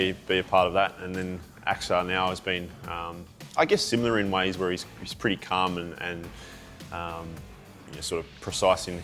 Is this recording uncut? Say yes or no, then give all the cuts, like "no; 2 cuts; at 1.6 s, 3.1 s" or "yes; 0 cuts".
yes; 0 cuts